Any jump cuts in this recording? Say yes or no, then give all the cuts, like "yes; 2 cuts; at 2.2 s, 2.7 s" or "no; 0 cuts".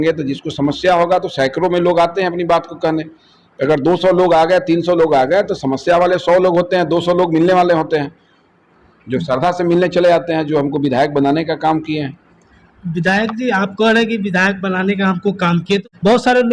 no; 0 cuts